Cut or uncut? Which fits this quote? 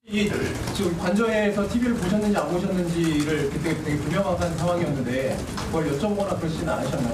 cut